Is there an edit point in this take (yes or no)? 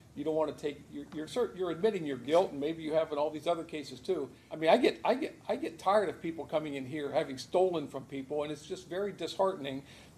yes